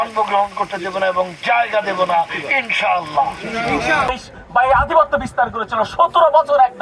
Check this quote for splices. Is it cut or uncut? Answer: cut